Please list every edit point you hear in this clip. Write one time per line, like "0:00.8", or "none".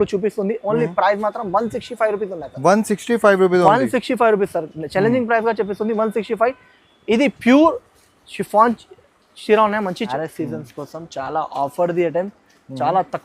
0:10.1